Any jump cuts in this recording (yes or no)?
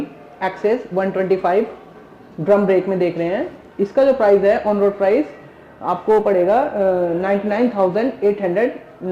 no